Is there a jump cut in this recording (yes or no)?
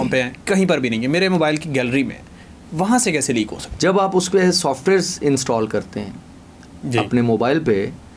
yes